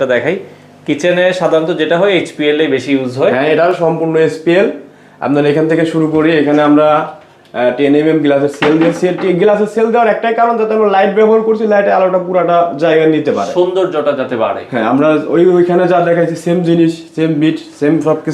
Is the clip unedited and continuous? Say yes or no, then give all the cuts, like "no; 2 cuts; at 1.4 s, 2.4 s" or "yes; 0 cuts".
yes; 0 cuts